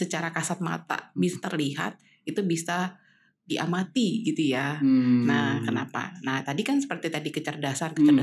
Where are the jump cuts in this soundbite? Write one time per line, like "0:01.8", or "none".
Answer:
none